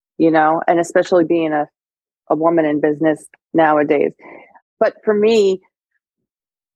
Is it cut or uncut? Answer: cut